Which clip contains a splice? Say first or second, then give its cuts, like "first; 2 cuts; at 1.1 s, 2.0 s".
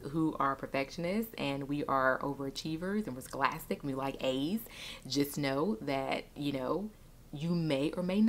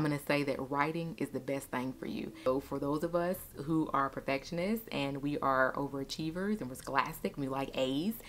second; 1 cut; at 2.5 s